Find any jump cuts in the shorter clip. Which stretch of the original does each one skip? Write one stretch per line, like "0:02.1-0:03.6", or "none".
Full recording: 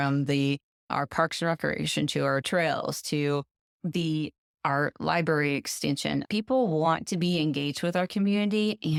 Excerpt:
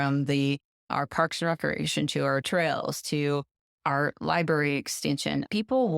0:03.6-0:04.4